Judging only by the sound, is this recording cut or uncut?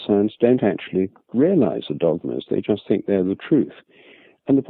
uncut